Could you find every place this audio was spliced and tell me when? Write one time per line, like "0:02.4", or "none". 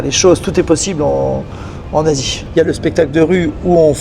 0:02.4